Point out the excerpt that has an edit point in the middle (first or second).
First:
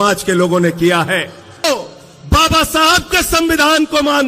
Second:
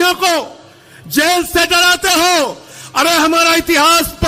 first